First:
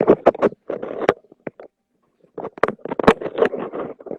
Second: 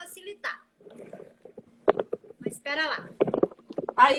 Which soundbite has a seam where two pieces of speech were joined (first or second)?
first